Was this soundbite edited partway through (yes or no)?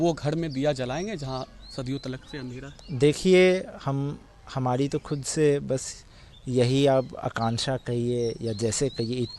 no